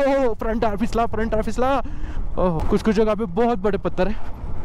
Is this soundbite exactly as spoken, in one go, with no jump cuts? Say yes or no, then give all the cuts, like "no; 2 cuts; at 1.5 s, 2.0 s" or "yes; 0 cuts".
no; 1 cut; at 2.6 s